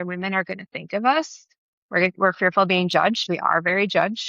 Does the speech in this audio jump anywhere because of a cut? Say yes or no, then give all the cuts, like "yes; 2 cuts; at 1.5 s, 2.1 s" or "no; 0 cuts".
yes; 1 cut; at 3.2 s